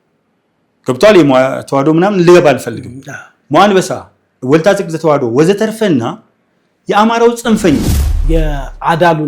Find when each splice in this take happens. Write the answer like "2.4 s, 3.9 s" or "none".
8.2 s